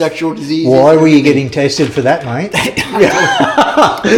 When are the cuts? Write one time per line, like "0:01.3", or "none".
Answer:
none